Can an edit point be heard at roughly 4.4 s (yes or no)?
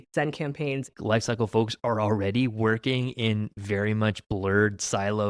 no